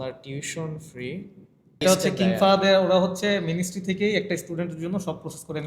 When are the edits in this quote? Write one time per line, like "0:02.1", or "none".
0:01.8